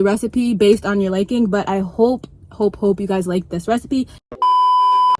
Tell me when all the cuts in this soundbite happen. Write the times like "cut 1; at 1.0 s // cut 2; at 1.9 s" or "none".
cut 1; at 4.1 s